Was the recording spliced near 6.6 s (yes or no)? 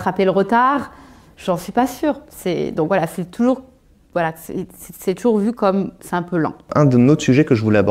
yes